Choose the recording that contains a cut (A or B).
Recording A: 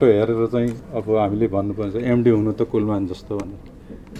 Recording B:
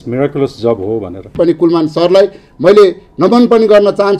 B